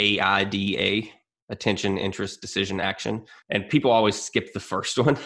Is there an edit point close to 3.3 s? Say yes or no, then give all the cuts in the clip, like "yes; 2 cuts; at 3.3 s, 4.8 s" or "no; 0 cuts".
yes; 1 cut; at 3.3 s